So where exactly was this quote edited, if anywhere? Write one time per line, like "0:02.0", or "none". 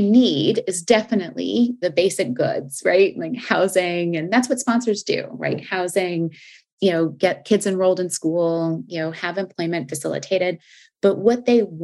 0:01.8
0:06.6